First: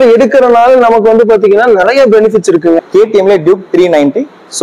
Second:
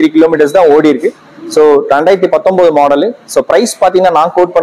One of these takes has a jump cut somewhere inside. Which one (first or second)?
first